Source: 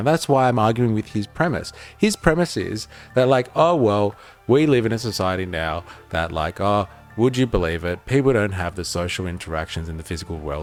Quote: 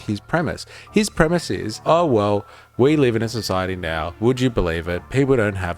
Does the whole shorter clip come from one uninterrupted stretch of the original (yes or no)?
no